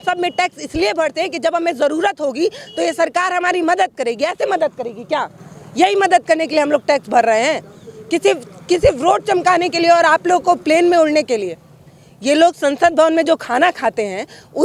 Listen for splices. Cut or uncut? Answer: uncut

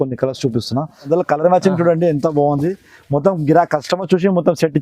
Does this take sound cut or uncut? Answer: cut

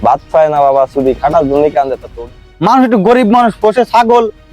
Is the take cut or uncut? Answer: cut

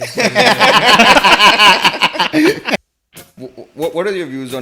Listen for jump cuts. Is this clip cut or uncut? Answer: cut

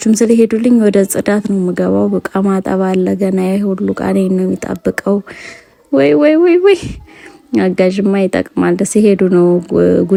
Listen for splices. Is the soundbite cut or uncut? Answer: uncut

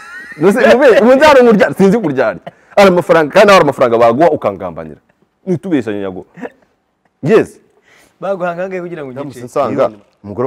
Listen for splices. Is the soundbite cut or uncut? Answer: cut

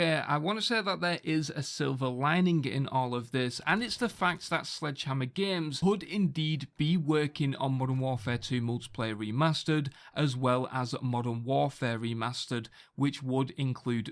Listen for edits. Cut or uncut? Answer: uncut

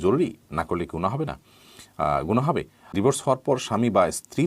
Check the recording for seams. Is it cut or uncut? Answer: cut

